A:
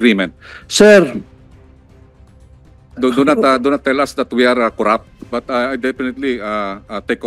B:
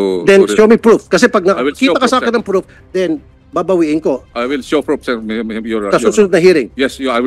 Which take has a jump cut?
A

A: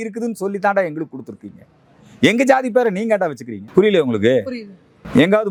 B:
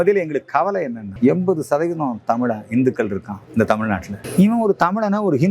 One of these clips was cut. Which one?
B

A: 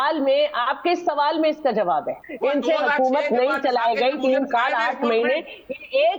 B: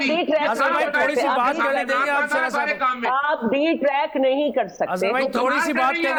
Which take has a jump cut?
A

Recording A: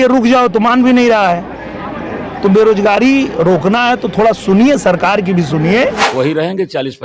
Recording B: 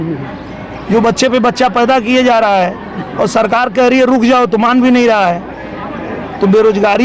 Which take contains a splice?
A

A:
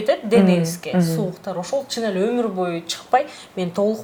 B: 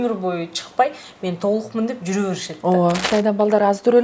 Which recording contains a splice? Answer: B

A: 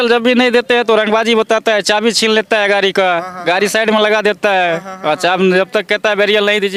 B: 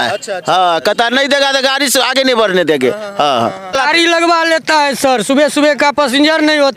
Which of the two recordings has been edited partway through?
B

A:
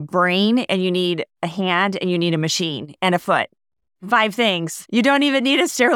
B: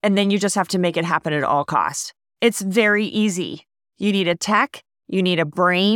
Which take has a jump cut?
A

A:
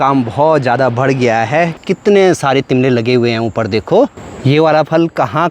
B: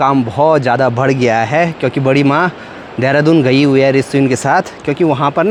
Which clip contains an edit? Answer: A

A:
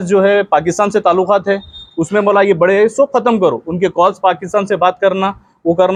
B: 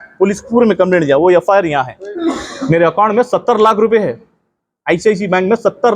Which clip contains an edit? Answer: B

